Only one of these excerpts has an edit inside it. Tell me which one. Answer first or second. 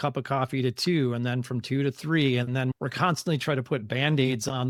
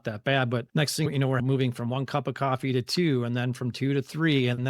second